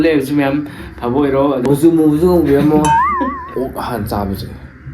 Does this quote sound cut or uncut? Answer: cut